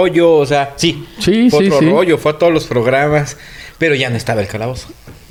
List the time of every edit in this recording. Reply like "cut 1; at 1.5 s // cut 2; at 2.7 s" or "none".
none